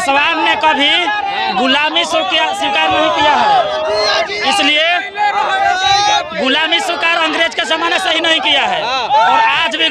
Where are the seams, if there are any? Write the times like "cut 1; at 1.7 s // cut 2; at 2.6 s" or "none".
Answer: none